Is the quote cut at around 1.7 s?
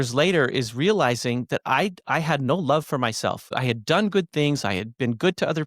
no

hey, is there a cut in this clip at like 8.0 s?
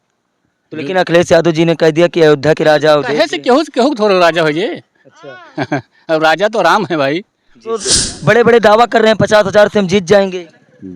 yes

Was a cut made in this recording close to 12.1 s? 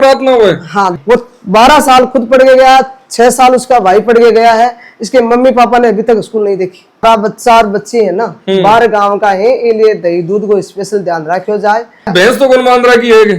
yes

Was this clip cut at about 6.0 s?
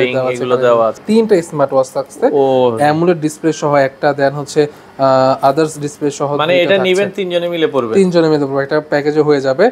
no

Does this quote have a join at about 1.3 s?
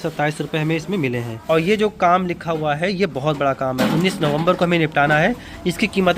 yes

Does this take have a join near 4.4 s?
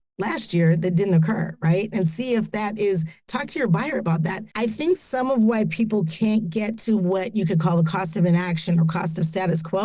yes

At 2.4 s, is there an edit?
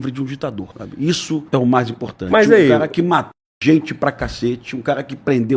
no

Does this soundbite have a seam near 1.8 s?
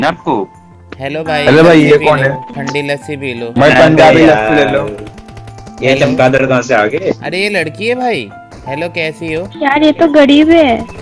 no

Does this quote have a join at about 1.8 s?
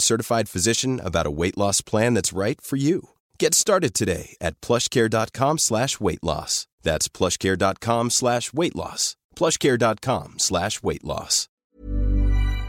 no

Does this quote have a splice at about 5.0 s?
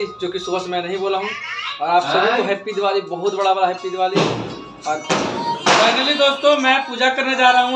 yes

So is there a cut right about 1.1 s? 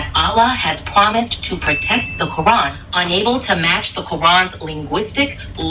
no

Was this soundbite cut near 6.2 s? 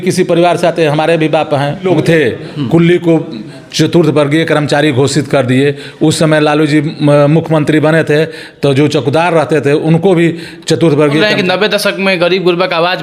no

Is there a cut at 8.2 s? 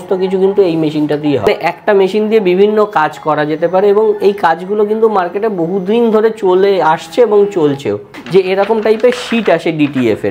yes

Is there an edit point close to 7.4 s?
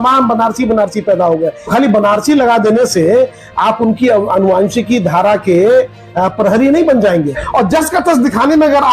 yes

